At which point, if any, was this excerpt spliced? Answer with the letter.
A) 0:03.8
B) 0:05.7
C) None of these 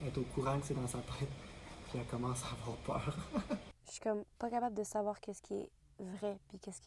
A